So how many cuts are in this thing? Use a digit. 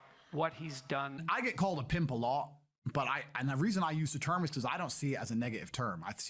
1